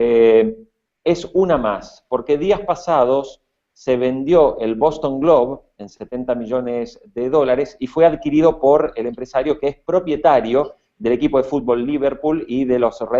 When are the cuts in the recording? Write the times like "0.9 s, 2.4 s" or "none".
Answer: 7.3 s